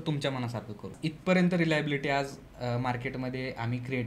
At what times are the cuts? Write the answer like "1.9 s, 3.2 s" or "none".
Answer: 0.9 s